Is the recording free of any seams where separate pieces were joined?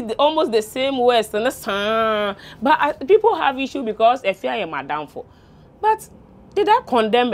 yes; 0 cuts

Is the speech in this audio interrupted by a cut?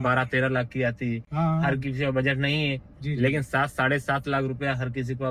no; 0 cuts

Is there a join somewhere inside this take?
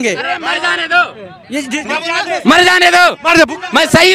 no; 0 cuts

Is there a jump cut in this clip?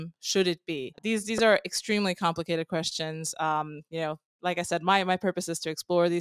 yes; 1 cut; at 1.0 s

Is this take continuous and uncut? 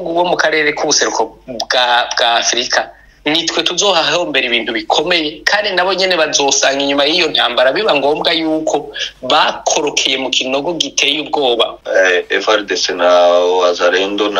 no; 1 cut; at 11.8 s

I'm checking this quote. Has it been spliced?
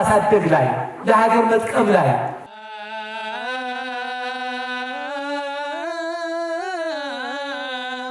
yes; 1 cut; at 2.4 s

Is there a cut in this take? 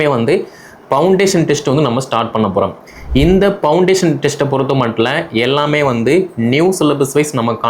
no; 0 cuts

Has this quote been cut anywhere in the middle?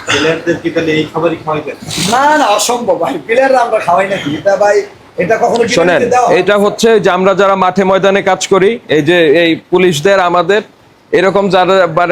no; 0 cuts

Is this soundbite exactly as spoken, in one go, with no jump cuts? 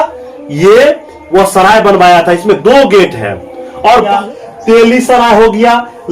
no; 1 cut; at 4.1 s

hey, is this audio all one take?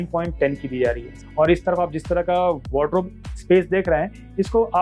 no; 1 cut; at 1.1 s

